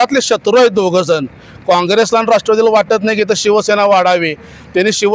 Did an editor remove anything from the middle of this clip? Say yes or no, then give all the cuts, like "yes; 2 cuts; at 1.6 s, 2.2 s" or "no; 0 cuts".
no; 0 cuts